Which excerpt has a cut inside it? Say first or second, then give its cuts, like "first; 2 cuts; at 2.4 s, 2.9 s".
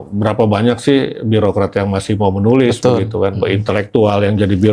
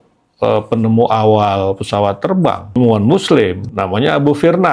second; 2 cuts; at 2.7 s, 3.7 s